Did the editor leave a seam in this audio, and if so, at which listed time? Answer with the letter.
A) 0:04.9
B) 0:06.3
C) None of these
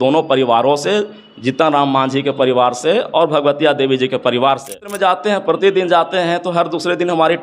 A